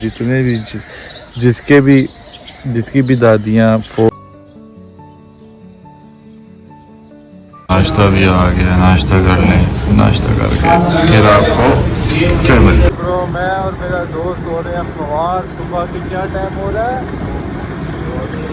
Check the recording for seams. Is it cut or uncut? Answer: cut